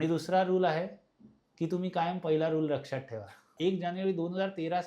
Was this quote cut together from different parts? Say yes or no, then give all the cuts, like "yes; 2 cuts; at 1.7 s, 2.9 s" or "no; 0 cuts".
yes; 1 cut; at 3.5 s